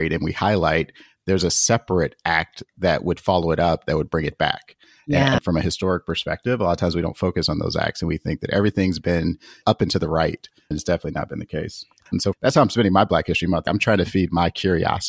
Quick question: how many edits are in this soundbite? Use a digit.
3